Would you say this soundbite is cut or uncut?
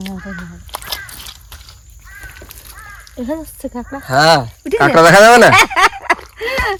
uncut